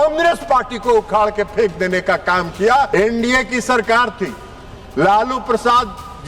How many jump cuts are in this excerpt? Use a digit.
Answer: 1